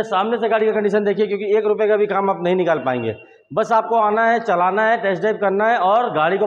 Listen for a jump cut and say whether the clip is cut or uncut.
uncut